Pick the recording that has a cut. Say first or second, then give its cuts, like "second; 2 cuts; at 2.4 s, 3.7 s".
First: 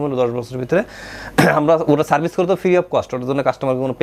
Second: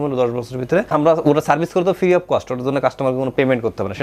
second; 1 cut; at 0.9 s